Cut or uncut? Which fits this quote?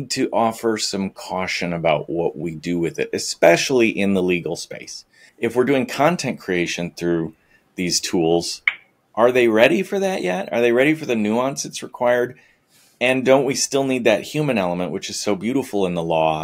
cut